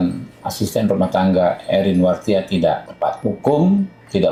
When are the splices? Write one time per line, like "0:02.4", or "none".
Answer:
none